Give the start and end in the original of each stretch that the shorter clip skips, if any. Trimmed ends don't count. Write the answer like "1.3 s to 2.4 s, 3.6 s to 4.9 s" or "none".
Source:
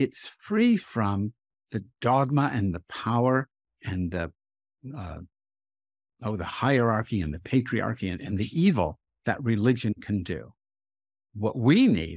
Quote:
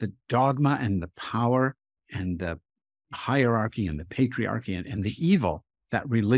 4.9 s to 6.5 s